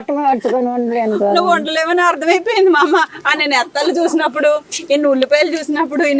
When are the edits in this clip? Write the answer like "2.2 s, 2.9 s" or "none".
none